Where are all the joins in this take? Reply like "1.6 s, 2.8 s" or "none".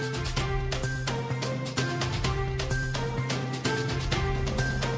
none